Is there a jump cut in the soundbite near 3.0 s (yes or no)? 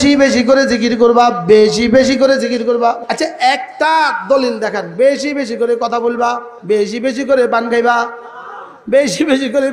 yes